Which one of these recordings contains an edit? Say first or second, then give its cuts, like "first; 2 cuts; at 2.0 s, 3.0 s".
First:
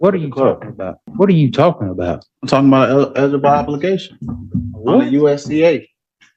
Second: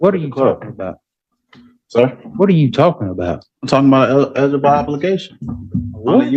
first; 1 cut; at 1.0 s